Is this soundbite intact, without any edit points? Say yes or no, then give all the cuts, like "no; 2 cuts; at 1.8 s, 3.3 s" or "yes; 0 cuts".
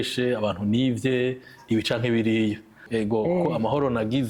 no; 1 cut; at 2.8 s